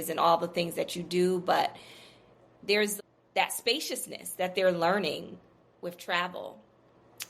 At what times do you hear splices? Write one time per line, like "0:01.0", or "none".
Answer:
0:02.9